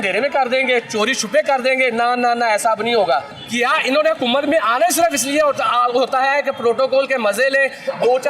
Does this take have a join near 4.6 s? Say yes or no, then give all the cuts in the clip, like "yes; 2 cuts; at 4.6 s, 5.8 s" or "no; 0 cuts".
no; 1 cut; at 3.3 s